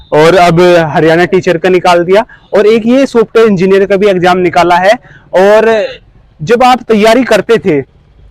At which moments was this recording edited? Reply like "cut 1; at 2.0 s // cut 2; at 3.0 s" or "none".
none